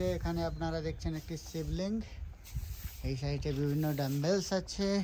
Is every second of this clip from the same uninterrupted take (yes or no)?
yes